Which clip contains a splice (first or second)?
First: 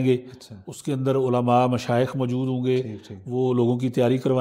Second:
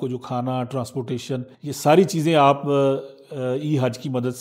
second